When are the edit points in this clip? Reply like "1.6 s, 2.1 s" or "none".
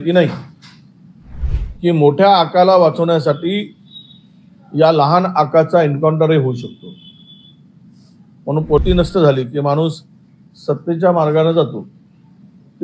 1.5 s, 8.8 s